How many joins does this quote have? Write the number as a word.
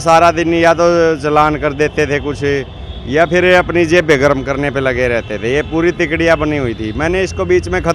zero